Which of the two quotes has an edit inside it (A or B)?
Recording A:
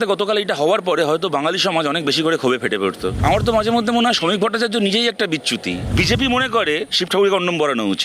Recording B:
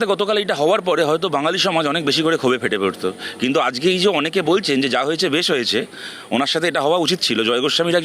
A